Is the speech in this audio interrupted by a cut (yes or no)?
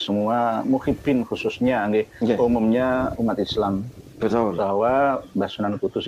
no